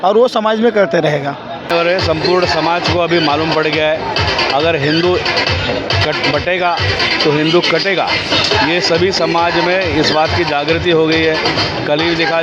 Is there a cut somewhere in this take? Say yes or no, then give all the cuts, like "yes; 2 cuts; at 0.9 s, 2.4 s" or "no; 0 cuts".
yes; 1 cut; at 1.7 s